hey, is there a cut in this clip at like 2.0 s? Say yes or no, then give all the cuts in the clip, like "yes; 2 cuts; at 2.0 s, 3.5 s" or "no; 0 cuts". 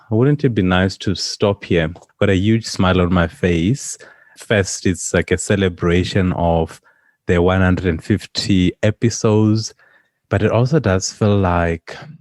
yes; 1 cut; at 2.0 s